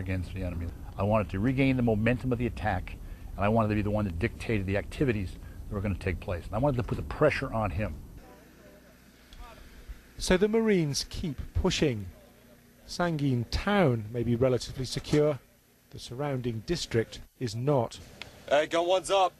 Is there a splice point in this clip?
yes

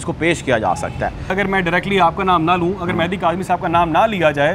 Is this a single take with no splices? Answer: no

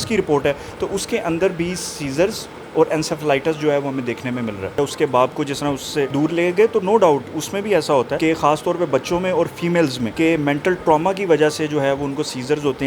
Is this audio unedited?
no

